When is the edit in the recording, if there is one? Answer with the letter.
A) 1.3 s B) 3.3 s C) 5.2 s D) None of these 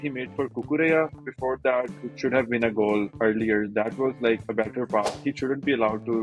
C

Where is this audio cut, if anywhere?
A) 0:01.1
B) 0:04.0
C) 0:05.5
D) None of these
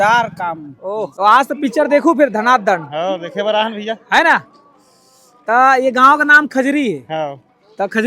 A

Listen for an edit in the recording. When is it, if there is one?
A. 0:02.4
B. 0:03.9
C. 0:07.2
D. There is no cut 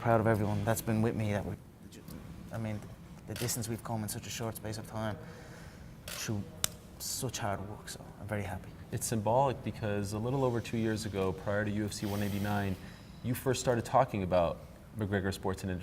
C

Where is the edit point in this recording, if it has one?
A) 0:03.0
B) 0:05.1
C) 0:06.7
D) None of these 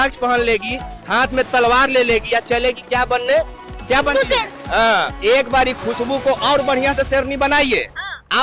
B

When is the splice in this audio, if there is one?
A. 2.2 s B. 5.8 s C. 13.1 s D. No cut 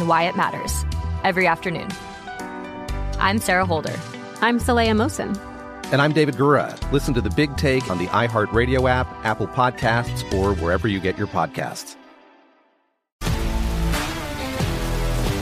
C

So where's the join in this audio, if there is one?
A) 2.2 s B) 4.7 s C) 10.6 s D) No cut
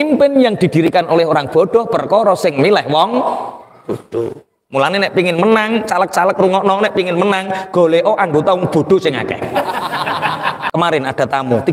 C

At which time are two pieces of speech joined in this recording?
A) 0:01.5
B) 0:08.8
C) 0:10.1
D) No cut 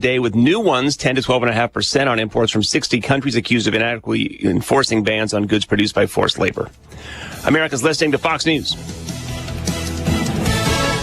B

